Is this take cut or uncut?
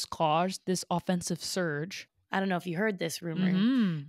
cut